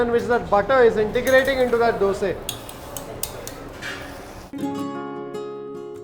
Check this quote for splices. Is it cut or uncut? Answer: cut